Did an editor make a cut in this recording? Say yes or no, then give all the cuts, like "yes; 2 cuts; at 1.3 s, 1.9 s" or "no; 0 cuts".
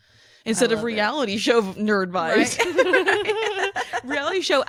no; 0 cuts